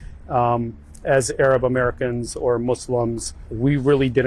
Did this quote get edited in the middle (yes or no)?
no